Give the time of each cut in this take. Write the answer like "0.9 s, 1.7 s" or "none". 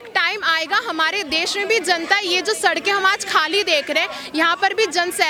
none